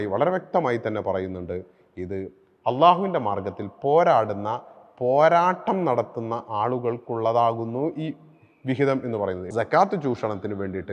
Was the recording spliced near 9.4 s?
yes; 1 cut; at 9.4 s

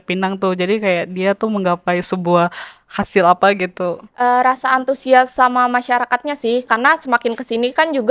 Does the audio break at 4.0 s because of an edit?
yes; 1 cut; at 4.0 s

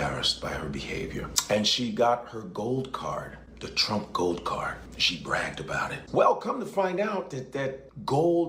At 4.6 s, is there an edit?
no; 1 cut; at 6.0 s

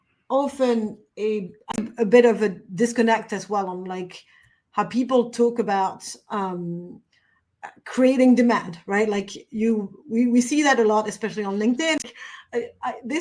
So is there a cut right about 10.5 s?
no; 2 cuts; at 1.7 s, 12.0 s

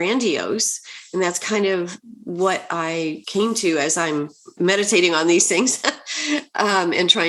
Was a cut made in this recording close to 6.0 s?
no; 2 cuts; at 3.2 s, 4.4 s

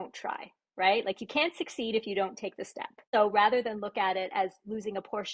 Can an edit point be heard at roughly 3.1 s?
yes; 1 cut; at 3.1 s

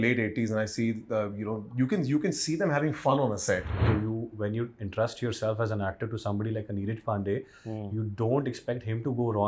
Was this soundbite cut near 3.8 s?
yes; 1 cut; at 3.8 s

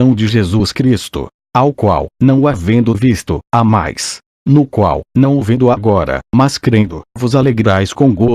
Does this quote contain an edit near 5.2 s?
no; 0 cuts

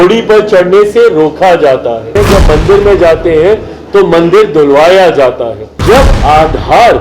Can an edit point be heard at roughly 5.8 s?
yes; 2 cuts; at 2.2 s, 5.8 s

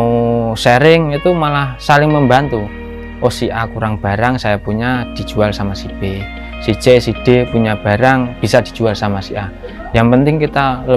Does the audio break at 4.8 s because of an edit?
no; 0 cuts

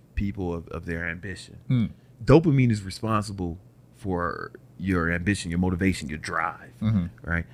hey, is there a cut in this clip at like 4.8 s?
no; 1 cut; at 2.1 s

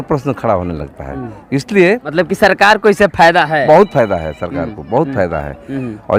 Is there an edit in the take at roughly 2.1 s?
yes; 1 cut; at 2.1 s

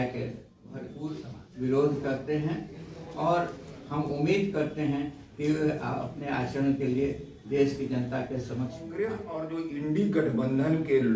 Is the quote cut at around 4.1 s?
no; 2 cuts; at 1.0 s, 8.9 s

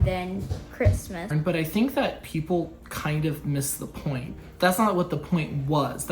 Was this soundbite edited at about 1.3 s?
yes; 2 cuts; at 1.3 s, 4.3 s

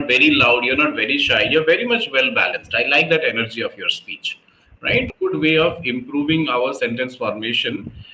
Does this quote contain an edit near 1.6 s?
no; 1 cut; at 5.1 s

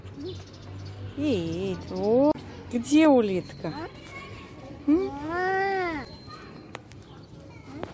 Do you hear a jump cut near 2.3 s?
yes; 1 cut; at 2.3 s

